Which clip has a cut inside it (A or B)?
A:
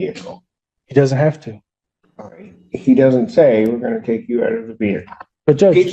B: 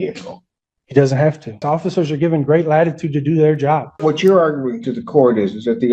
B